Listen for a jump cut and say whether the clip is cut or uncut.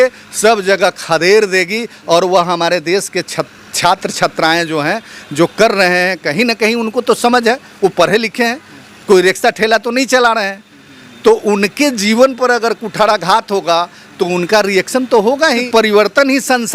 cut